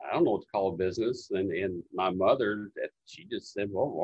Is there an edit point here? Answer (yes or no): no